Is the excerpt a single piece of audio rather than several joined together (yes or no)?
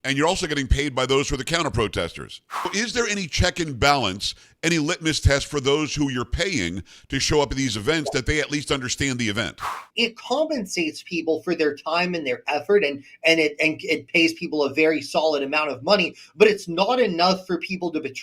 no